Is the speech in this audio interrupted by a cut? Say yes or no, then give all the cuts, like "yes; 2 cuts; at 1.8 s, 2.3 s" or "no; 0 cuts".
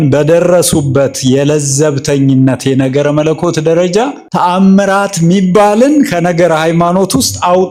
no; 0 cuts